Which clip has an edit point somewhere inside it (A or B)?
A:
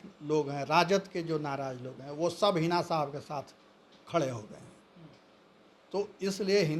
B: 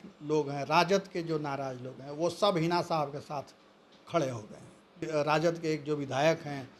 B